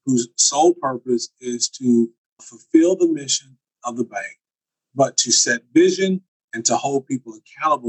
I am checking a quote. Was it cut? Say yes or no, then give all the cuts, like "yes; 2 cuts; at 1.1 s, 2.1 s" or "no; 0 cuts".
yes; 1 cut; at 2.5 s